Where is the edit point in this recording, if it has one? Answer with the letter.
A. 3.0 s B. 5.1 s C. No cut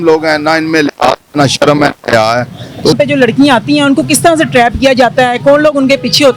A